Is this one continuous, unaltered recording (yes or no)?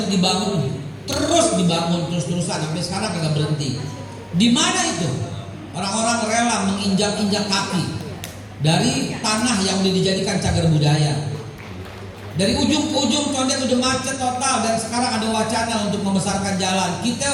yes